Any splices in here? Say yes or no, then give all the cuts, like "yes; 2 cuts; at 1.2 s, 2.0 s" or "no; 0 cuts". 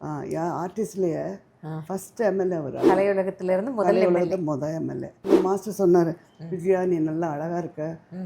yes; 1 cut; at 5.2 s